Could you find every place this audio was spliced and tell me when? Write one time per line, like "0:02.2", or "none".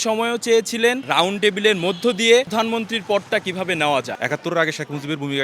0:01.0
0:02.5
0:04.2